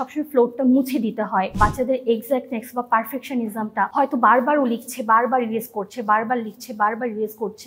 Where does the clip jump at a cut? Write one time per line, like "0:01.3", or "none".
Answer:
0:01.5
0:03.9